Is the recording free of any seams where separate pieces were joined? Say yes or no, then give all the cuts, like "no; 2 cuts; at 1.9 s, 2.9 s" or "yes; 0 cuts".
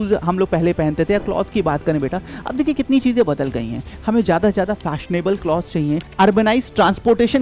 no; 1 cut; at 6.1 s